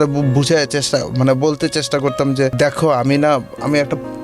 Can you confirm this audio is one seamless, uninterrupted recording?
no; 1 cut; at 2.5 s

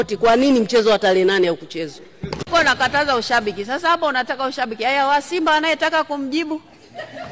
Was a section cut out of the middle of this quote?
yes; 1 cut; at 2.5 s

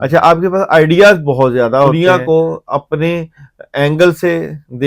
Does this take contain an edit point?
yes; 1 cut; at 1.9 s

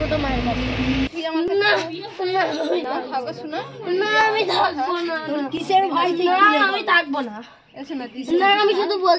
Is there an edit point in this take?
yes; 1 cut; at 1.1 s

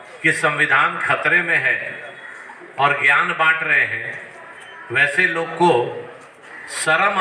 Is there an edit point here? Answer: no; 0 cuts

